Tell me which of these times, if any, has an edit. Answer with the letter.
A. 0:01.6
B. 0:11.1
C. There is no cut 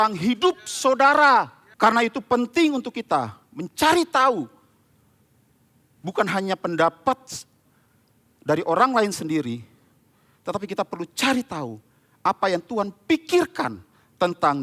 A